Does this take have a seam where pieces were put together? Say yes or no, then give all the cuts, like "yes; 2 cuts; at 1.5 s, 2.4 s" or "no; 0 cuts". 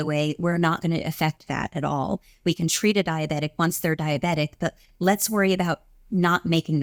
no; 0 cuts